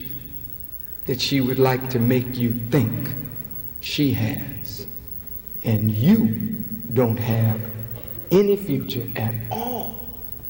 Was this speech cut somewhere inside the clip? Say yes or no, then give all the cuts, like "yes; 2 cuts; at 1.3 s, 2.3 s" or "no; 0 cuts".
no; 0 cuts